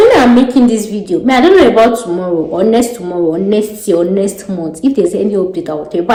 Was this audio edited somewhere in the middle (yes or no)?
no